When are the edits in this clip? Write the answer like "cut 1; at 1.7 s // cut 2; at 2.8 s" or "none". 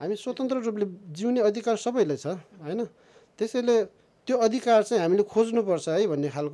none